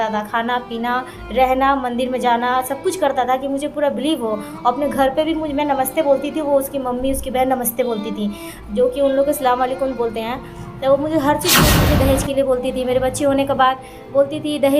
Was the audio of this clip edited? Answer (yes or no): yes